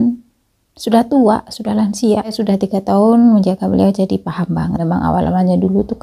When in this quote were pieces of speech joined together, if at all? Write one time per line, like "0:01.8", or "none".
0:02.4
0:04.8